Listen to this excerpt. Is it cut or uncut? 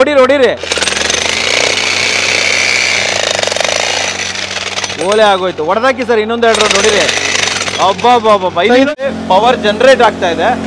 cut